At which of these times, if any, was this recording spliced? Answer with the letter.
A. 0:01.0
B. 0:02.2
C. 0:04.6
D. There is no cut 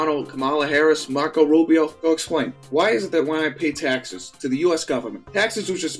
B